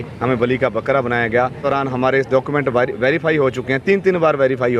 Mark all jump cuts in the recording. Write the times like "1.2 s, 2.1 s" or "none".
1.6 s

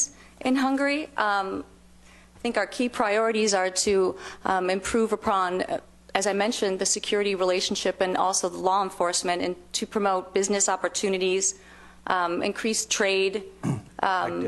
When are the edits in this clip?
5.3 s

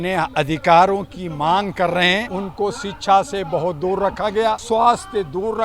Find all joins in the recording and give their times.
2.4 s, 4.6 s

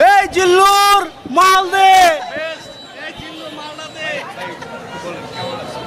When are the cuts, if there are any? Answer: none

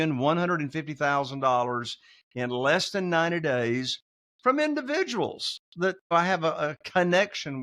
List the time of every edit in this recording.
6.1 s

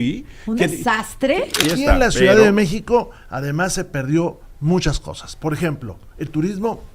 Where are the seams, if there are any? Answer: 1.6 s

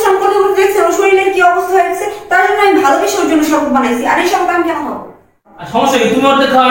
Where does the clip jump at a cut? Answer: 5.5 s

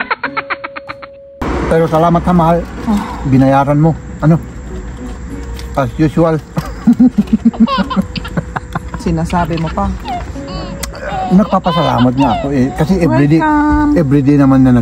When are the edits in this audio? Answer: 1.4 s

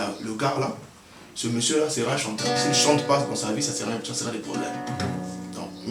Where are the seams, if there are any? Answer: none

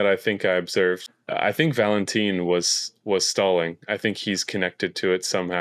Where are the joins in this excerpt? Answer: 1.0 s

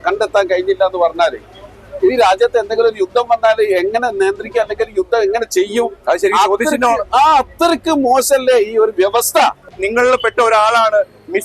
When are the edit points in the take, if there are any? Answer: 9.8 s

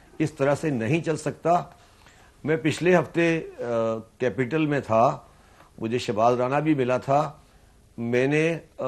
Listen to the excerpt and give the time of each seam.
none

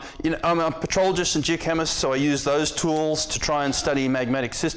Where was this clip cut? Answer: 1.8 s

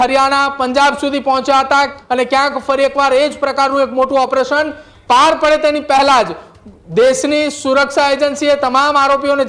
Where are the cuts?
2.0 s

